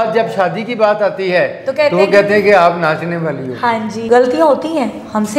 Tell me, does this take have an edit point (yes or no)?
yes